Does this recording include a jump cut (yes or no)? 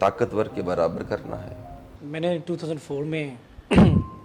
yes